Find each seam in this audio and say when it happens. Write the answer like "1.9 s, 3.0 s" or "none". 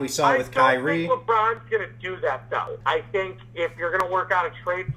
2.8 s